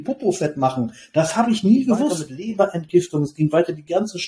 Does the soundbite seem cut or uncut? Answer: cut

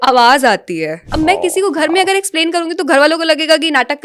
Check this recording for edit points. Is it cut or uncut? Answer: cut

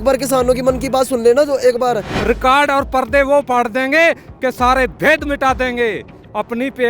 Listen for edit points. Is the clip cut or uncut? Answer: cut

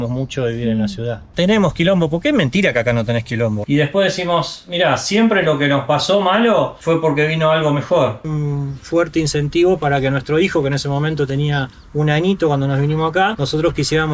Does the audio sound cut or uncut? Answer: cut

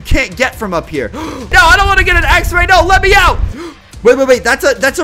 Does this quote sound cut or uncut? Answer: cut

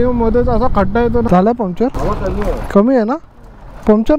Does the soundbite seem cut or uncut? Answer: cut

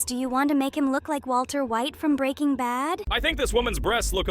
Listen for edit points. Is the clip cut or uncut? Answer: cut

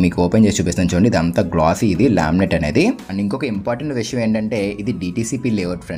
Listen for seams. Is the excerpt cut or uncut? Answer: cut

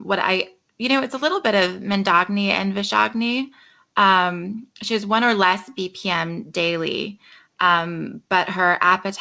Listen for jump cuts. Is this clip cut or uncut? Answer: cut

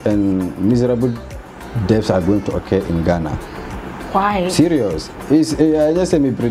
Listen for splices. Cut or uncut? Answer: uncut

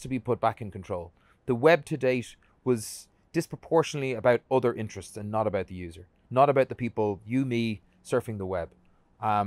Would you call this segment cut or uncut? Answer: uncut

